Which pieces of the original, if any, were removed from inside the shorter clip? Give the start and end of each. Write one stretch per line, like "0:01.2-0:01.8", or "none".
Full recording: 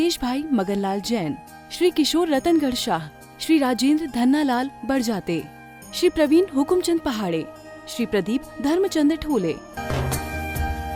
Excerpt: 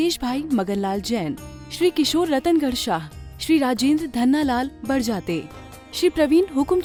none

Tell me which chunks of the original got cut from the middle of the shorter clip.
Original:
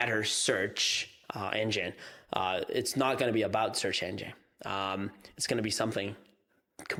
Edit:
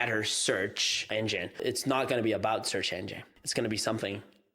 0:01.5-0:02.6
0:04.4-0:05.3

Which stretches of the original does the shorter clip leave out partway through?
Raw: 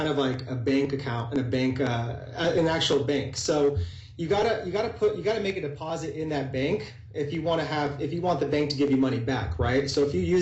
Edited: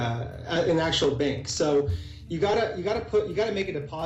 none

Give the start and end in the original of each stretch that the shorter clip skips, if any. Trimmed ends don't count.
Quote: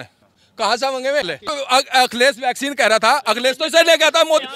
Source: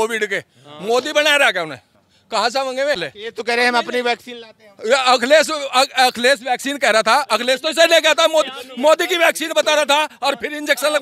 0:03.3-0:05.6

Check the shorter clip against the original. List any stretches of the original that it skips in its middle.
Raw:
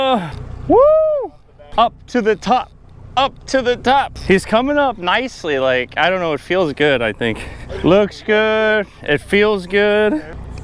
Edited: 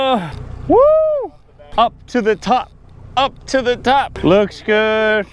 0:04.1-0:07.7

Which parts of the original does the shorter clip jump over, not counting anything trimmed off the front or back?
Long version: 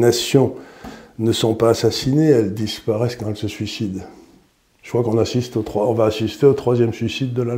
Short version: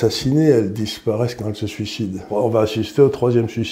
0:04.1-0:05.7

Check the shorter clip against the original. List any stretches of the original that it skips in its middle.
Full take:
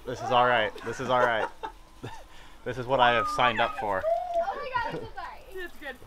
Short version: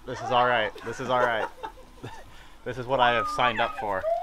none

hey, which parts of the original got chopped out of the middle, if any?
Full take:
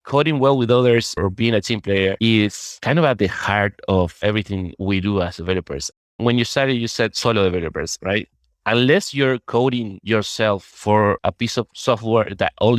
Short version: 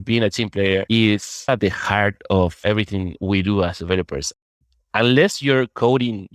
0:02.8-0:03.1
0:06.1-0:08.3

